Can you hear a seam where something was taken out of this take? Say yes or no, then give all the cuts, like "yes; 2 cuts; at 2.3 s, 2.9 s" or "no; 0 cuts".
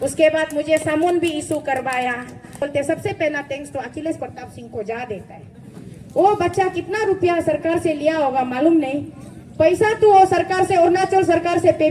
yes; 1 cut; at 2.6 s